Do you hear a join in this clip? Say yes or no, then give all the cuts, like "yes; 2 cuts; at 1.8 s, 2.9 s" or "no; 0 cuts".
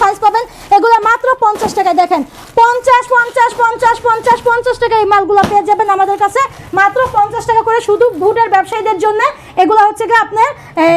no; 0 cuts